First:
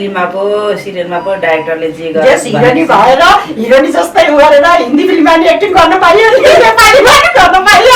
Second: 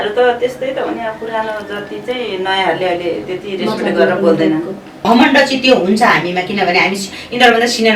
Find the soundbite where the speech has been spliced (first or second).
second